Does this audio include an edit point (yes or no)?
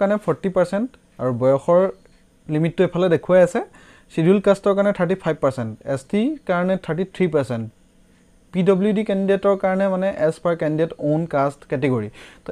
no